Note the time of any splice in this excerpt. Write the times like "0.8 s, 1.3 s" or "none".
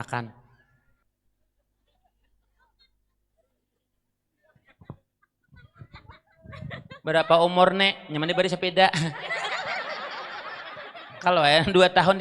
1.0 s

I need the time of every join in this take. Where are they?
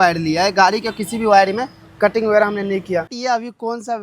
3.1 s

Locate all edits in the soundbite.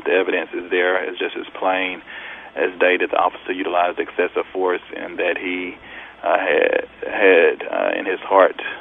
none

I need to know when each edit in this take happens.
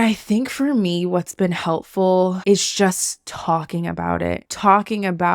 4.4 s

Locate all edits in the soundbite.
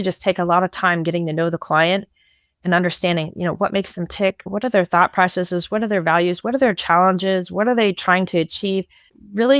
4.5 s

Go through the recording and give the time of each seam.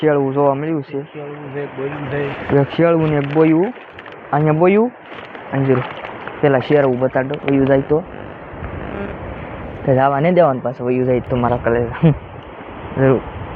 none

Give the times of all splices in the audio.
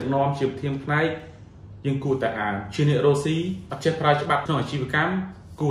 3.6 s, 4.4 s

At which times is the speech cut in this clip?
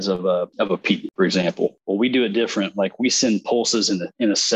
0.9 s, 1.8 s

